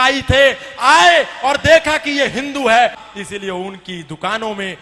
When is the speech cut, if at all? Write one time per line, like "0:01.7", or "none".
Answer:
0:03.0